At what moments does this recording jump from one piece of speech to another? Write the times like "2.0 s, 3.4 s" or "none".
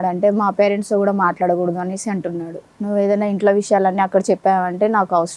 2.6 s